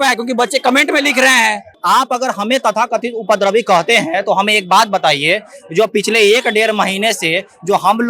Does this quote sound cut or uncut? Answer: cut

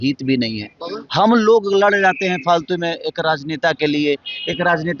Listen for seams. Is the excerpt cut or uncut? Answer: uncut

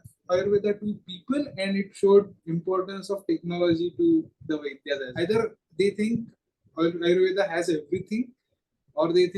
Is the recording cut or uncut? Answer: cut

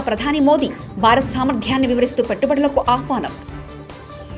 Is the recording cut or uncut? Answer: uncut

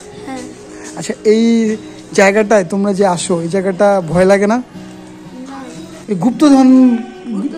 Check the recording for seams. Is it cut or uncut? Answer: cut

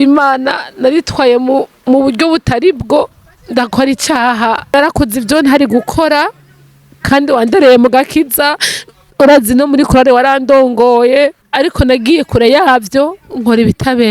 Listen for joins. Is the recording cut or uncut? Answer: cut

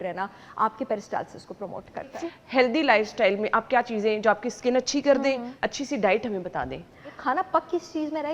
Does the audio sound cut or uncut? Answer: cut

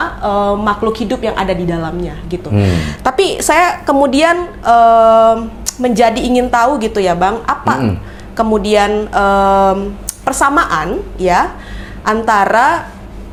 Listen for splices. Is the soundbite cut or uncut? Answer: uncut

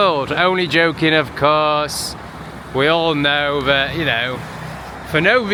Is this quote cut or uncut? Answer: uncut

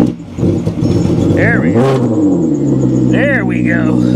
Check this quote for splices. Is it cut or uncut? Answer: uncut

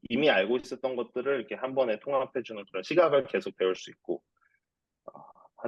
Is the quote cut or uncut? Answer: uncut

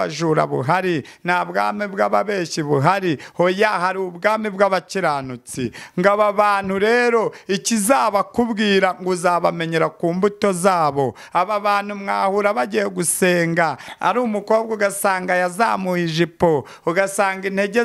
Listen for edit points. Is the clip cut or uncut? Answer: uncut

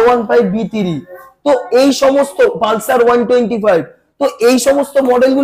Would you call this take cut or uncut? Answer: uncut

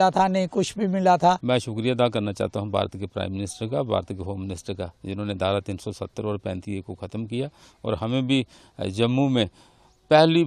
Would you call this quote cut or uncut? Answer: cut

